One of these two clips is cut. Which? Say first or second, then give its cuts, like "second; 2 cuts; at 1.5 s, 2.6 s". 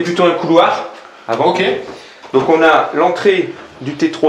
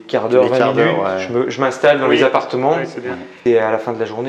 second; 1 cut; at 3.3 s